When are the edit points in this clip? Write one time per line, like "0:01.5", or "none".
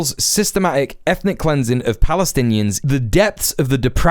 0:02.8